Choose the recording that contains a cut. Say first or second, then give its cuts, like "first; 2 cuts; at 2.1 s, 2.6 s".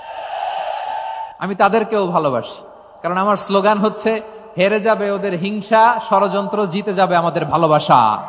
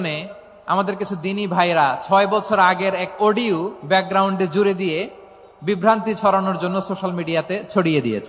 first; 1 cut; at 1.3 s